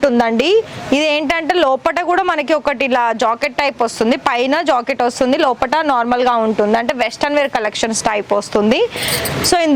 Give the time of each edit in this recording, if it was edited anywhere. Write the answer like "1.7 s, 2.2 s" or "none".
none